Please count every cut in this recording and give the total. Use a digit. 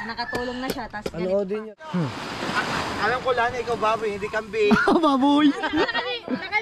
1